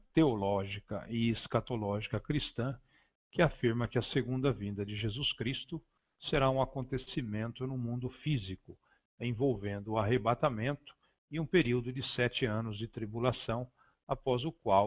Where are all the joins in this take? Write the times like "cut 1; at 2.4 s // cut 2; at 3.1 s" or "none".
cut 1; at 6.2 s